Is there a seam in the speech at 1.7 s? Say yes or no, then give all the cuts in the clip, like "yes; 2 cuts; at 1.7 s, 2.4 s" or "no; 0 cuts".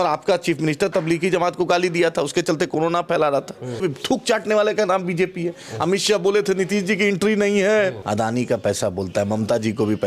no; 2 cuts; at 3.8 s, 8.0 s